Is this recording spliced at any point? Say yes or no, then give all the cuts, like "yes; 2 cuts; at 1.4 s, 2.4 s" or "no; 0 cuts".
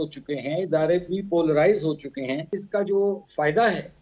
yes; 1 cut; at 2.6 s